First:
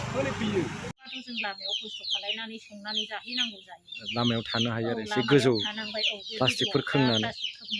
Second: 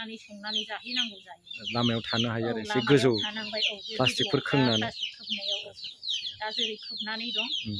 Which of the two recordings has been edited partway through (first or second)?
first